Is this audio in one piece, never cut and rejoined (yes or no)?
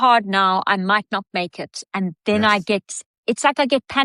yes